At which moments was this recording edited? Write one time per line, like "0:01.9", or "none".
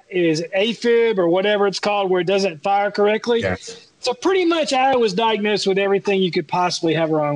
none